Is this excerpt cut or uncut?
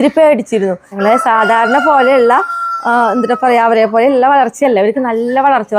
cut